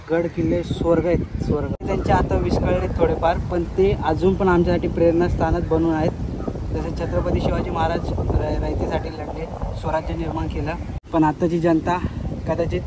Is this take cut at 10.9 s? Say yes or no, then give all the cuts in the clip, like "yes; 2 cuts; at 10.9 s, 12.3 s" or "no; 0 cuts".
yes; 2 cuts; at 1.8 s, 10.9 s